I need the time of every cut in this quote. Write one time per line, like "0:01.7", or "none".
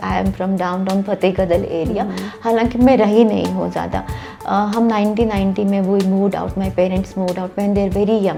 none